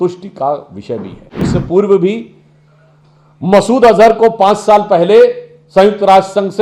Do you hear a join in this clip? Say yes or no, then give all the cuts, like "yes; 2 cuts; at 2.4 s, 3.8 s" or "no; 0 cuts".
yes; 1 cut; at 1.5 s